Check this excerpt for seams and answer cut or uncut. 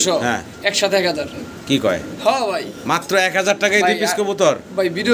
uncut